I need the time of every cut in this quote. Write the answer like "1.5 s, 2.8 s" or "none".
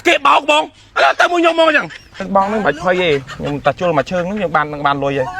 2.2 s